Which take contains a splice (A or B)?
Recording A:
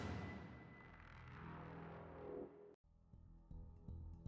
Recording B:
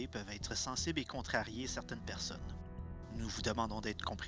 A